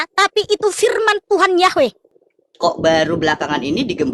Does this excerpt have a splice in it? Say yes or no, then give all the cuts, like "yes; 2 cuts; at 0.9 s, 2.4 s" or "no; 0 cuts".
yes; 1 cut; at 2.1 s